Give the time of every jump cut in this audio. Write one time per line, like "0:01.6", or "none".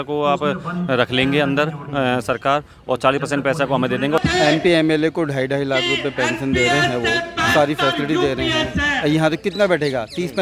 0:04.2